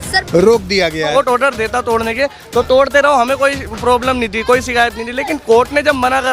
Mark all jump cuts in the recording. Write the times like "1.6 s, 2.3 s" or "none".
1.1 s